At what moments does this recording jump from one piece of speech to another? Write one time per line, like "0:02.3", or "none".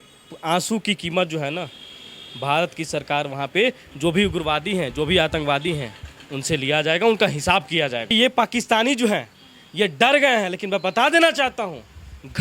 0:08.1